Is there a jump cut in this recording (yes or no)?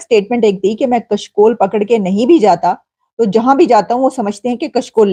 no